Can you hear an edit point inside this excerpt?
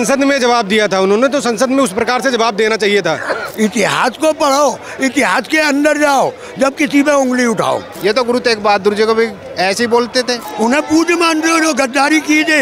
yes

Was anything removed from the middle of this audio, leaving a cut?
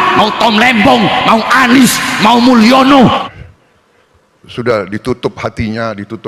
yes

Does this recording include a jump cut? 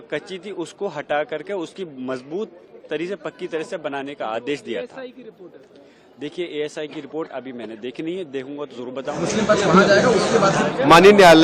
no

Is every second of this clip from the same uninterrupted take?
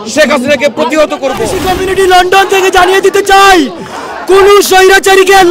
no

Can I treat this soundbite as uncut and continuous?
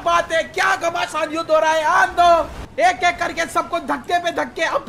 no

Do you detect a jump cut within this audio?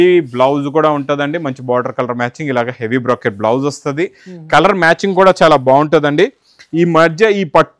no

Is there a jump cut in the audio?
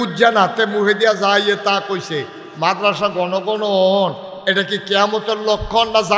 no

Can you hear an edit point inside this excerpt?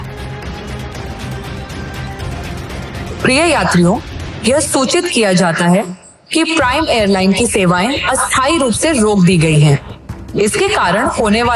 yes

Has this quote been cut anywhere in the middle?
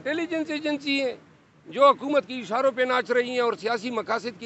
no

